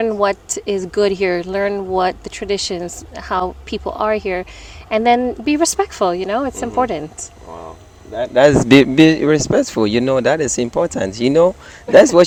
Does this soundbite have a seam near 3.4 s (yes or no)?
no